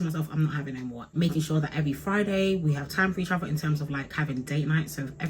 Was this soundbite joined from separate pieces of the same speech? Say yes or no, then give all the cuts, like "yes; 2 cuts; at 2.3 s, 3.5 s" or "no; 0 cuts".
yes; 1 cut; at 1.0 s